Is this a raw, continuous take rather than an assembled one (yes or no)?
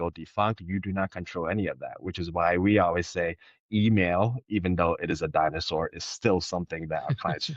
yes